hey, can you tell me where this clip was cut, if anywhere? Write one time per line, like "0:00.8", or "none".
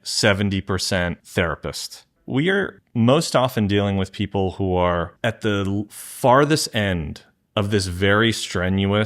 0:02.1